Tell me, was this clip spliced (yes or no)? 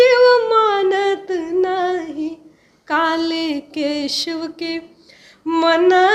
no